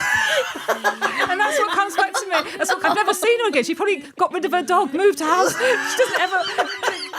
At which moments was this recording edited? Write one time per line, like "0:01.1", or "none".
0:02.8